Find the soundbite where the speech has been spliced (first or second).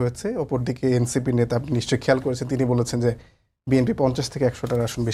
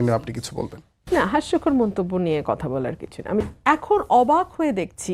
second